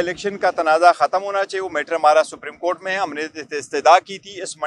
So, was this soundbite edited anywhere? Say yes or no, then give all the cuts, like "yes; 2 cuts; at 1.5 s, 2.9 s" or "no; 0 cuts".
no; 0 cuts